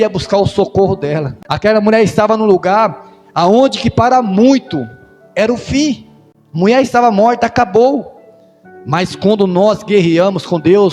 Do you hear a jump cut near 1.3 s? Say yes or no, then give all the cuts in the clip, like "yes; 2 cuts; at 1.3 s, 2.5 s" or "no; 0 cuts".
yes; 1 cut; at 1.3 s